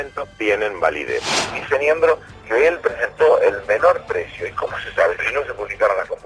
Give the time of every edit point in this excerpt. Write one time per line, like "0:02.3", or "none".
0:01.3
0:05.2